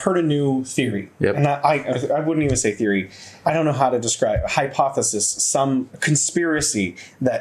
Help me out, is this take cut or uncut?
uncut